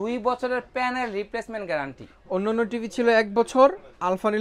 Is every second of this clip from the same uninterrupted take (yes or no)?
yes